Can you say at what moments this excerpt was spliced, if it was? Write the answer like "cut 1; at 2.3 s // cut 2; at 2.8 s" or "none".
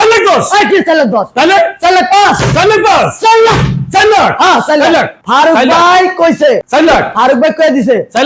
none